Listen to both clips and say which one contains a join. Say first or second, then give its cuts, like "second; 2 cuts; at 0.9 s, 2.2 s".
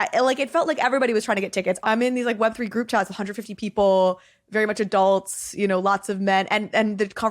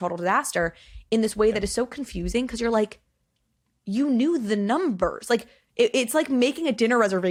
first; 1 cut; at 1.8 s